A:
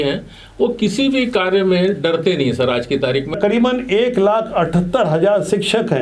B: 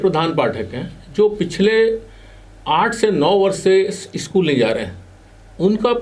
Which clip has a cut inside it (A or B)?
A